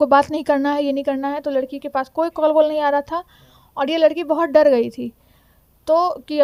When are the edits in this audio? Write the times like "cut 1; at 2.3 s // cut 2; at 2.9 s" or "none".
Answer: none